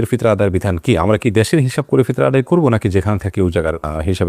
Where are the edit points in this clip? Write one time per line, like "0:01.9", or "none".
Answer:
none